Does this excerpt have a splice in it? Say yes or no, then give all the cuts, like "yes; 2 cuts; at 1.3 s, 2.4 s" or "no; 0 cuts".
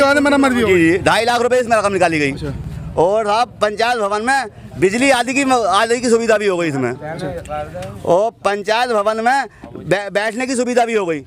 no; 0 cuts